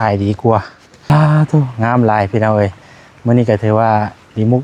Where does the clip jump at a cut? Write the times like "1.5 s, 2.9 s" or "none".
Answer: 1.1 s